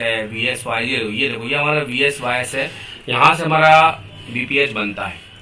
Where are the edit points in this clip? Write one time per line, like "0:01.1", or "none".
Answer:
none

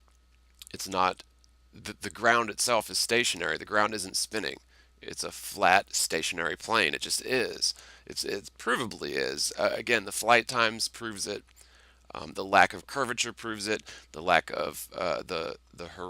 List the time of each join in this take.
0:10.3

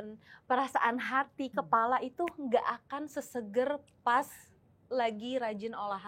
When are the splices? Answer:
none

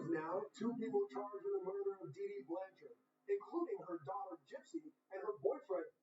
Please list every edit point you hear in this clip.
none

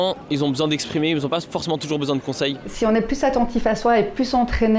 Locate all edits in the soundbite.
0:02.6

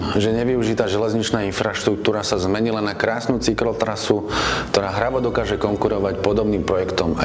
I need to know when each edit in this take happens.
none

